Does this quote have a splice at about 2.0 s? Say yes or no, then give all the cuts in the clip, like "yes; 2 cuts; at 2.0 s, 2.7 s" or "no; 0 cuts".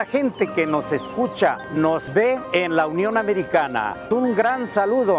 yes; 2 cuts; at 2.0 s, 4.0 s